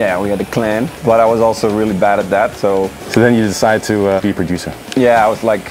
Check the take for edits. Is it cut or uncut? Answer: cut